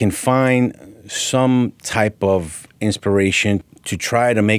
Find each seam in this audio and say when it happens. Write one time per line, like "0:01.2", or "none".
0:03.7